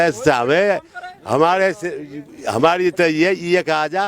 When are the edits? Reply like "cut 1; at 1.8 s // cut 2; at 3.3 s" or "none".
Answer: none